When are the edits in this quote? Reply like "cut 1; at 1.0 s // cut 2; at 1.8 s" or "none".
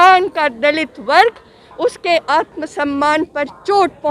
none